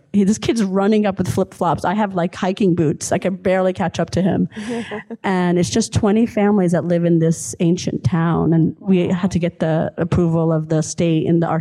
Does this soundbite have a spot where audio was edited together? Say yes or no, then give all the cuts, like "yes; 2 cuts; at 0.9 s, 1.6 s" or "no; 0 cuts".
no; 0 cuts